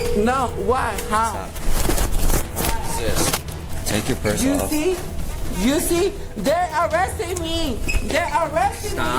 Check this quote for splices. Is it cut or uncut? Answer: uncut